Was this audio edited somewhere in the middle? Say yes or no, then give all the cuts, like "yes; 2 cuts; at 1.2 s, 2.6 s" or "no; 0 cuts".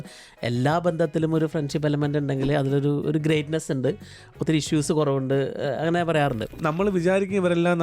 yes; 1 cut; at 6.6 s